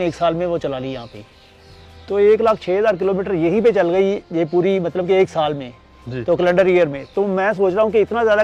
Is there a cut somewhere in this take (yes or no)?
no